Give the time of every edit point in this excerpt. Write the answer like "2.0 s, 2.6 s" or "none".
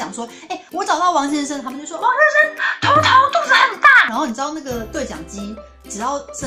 none